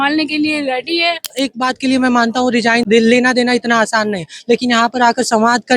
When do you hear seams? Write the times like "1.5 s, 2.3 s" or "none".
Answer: 1.3 s, 2.8 s